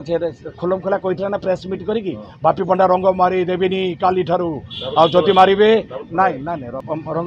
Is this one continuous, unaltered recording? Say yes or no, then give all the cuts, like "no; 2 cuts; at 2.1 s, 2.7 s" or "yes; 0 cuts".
yes; 0 cuts